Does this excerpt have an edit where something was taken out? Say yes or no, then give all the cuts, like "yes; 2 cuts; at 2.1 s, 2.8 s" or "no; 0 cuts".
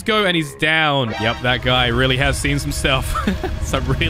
yes; 1 cut; at 1.1 s